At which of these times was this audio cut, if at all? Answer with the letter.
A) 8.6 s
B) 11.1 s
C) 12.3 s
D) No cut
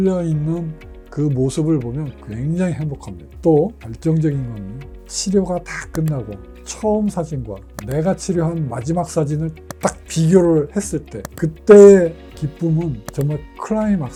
D